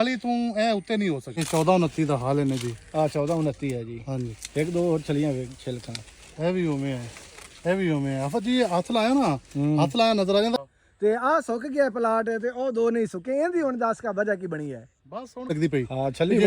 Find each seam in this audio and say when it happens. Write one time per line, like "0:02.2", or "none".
0:01.3
0:10.6
0:15.5